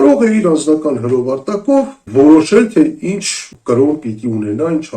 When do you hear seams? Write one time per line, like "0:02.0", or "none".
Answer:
0:02.0
0:03.4